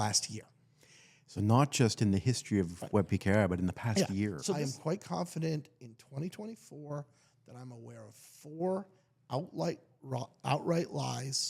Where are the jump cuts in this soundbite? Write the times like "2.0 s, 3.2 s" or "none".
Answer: 4.4 s